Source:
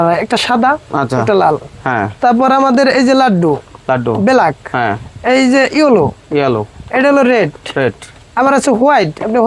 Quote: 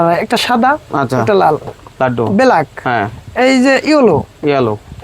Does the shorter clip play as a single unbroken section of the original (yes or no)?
no